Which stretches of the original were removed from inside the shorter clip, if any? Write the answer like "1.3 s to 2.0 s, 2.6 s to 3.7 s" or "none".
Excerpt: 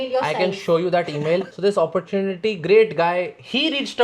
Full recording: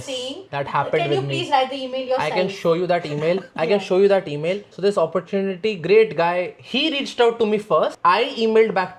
3.5 s to 4.7 s